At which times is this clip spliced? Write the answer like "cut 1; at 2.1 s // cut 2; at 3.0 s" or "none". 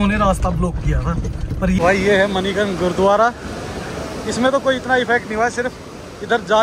cut 1; at 1.8 s